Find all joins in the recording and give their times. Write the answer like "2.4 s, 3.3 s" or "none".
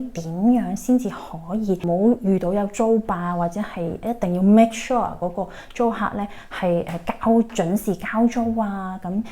1.8 s